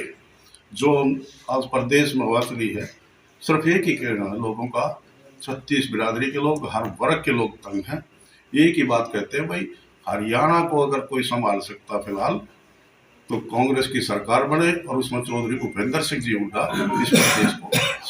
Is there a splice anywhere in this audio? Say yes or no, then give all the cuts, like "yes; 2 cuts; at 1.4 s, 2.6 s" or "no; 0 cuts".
no; 0 cuts